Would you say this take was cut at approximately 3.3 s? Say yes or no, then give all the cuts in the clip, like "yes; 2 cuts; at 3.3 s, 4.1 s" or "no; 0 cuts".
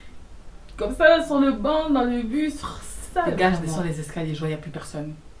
yes; 1 cut; at 3.3 s